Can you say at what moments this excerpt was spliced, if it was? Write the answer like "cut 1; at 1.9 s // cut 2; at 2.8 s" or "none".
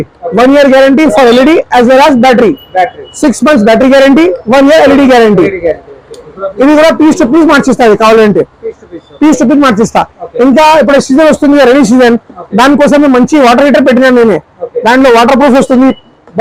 none